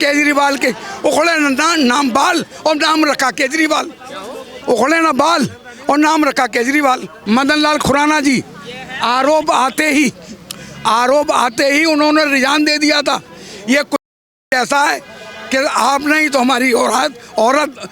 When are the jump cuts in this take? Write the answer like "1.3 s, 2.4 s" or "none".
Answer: 7.1 s